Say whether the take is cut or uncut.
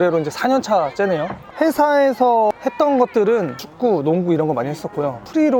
uncut